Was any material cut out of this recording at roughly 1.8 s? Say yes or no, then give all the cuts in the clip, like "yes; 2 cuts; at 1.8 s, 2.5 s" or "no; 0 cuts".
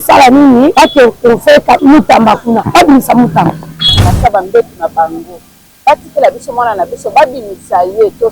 yes; 4 cuts; at 0.7 s, 1.8 s, 2.6 s, 4.1 s